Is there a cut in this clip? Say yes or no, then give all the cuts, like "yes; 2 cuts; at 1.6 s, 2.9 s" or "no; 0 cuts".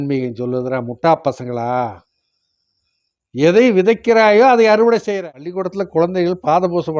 yes; 1 cut; at 5.2 s